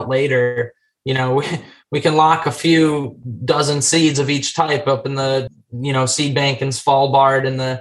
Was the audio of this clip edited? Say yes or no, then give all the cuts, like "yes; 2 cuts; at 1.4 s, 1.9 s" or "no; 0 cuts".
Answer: yes; 1 cut; at 5.5 s